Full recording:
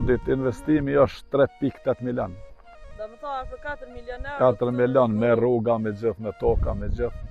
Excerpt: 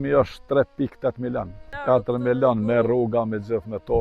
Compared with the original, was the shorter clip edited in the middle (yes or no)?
yes